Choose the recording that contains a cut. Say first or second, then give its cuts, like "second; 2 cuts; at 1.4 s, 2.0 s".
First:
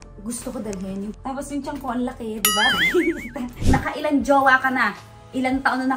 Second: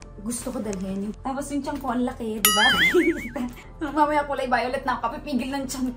first; 1 cut; at 3.6 s